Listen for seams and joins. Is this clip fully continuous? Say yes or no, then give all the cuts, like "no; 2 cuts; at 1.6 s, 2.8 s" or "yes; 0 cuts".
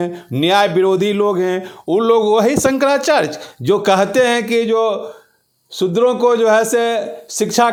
yes; 0 cuts